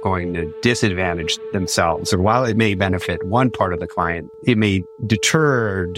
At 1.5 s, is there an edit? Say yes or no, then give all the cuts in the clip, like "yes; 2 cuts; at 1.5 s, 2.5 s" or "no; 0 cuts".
no; 0 cuts